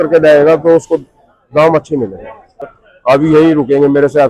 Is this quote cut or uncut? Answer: cut